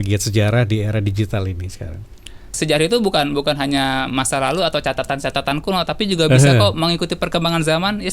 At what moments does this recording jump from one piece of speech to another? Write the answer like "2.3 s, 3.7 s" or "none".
2.5 s